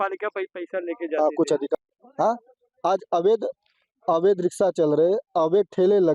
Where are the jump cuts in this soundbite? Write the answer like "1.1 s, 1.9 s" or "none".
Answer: 1.7 s